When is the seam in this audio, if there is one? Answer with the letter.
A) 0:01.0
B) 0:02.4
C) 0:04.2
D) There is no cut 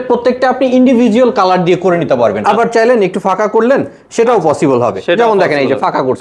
B